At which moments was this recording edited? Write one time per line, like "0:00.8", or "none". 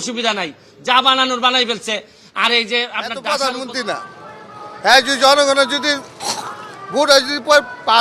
0:03.1

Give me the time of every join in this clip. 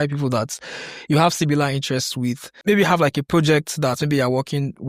0:02.5

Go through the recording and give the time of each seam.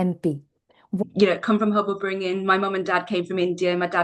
0:01.0

